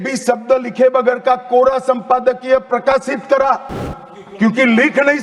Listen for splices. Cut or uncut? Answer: uncut